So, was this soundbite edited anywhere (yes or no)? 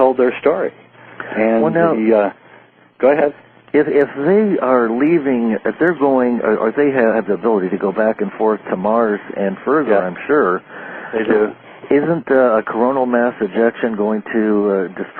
yes